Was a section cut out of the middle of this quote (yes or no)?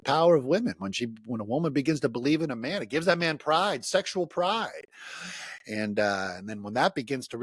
no